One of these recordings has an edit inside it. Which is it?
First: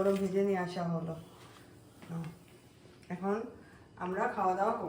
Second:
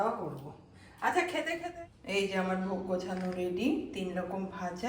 second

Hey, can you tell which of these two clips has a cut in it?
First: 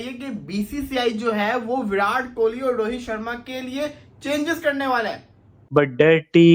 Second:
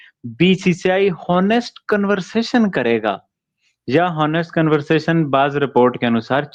first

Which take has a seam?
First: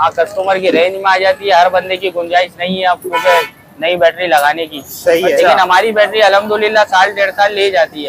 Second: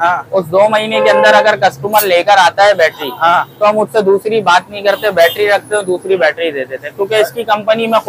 first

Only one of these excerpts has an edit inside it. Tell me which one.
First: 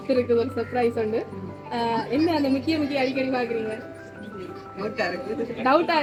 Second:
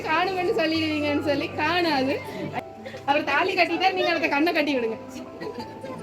second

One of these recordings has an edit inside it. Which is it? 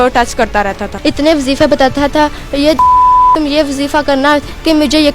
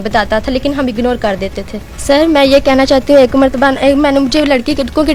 first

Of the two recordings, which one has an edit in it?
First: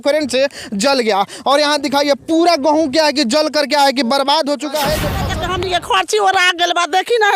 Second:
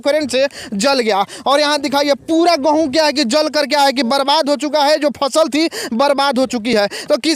first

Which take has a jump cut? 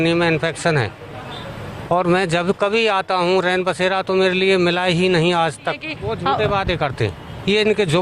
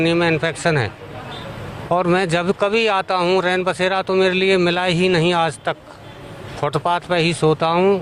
first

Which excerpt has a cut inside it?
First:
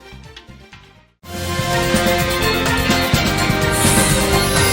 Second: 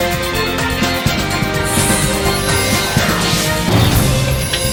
first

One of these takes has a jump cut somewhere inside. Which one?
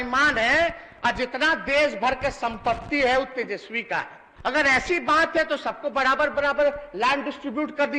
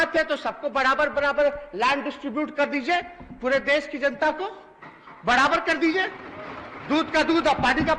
first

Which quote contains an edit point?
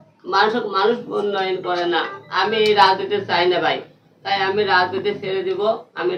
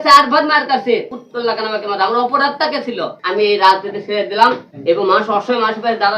second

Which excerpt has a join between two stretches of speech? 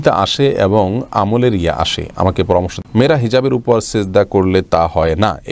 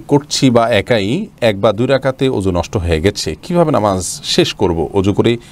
first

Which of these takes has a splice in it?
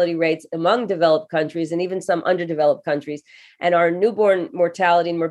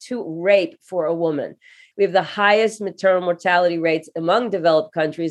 second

